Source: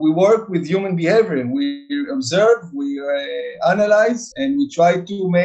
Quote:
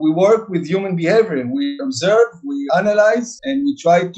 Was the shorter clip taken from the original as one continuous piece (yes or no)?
no